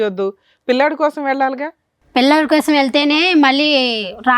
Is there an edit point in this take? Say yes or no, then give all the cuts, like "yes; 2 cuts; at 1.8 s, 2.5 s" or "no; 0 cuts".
no; 0 cuts